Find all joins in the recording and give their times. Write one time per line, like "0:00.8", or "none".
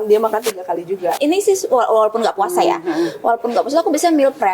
0:01.2